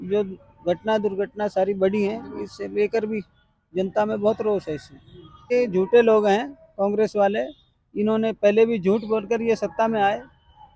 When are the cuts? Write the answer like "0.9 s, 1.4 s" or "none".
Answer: 5.4 s